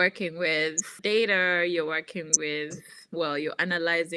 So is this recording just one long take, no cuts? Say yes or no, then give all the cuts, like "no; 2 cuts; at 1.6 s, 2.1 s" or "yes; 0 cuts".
no; 2 cuts; at 0.9 s, 3.0 s